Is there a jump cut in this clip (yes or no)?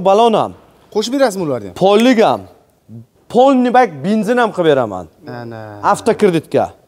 no